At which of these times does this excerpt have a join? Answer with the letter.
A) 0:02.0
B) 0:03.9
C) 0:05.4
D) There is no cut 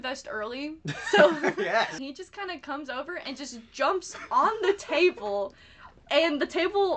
A